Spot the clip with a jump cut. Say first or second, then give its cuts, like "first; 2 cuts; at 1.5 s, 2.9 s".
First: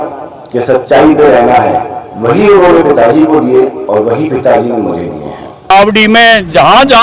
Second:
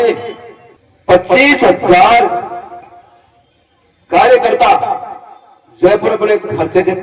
first; 1 cut; at 5.7 s